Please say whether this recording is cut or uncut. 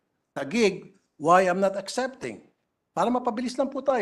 uncut